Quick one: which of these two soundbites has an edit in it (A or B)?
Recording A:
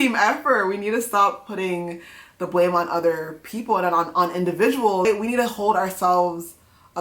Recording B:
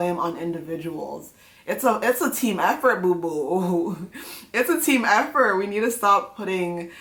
A